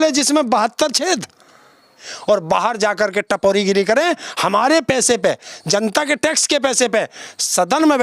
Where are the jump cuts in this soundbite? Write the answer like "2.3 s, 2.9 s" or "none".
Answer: 2.0 s